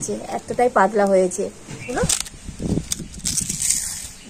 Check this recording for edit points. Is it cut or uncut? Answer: cut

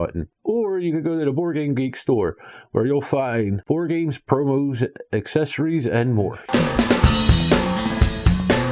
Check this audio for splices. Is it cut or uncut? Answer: cut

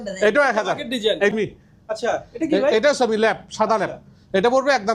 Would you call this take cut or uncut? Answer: cut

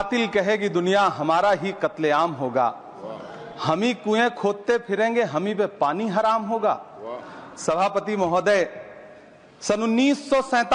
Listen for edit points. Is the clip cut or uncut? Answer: uncut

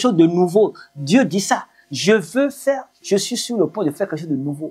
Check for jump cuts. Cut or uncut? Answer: uncut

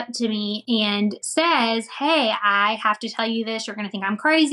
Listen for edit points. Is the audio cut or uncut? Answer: cut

